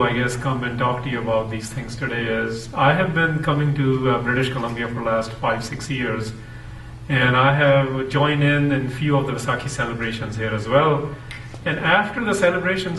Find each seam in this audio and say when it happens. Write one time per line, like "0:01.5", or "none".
0:02.2